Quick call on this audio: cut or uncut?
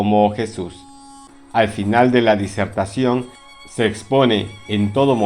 cut